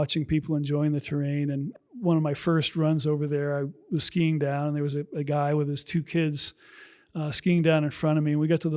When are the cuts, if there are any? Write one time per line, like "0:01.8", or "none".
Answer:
0:01.7